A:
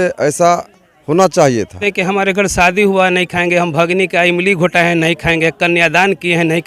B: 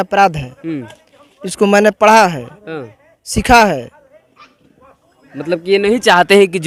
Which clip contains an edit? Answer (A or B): A